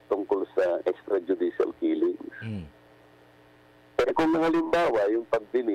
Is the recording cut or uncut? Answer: uncut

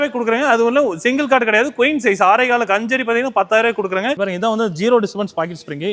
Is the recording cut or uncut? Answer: cut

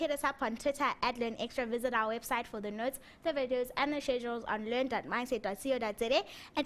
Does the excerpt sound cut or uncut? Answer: cut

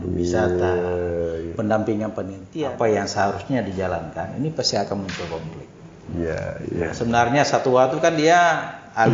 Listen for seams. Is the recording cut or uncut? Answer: cut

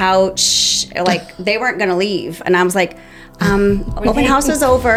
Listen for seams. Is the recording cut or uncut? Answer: uncut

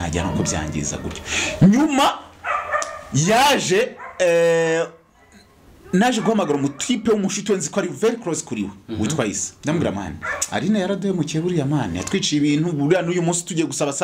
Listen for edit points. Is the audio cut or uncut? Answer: uncut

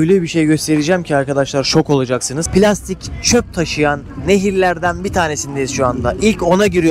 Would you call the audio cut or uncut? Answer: cut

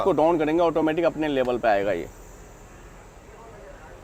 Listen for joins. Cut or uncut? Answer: uncut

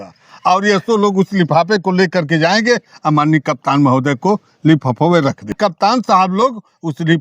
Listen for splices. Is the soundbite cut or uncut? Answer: cut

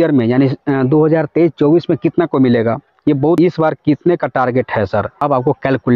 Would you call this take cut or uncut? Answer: cut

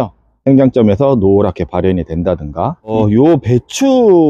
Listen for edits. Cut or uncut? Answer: cut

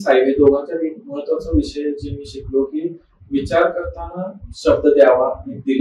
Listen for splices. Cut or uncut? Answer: uncut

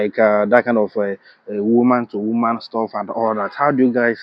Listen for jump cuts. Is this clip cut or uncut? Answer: uncut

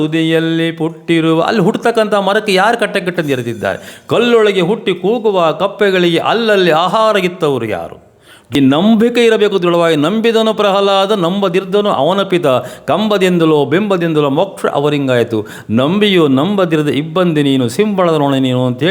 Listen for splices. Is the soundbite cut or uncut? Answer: cut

